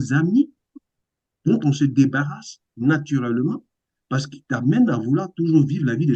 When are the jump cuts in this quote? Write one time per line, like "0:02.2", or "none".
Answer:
none